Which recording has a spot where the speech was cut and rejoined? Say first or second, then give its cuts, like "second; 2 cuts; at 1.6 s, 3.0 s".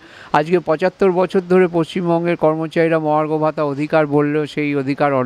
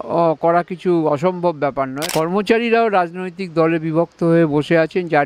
second; 1 cut; at 2.0 s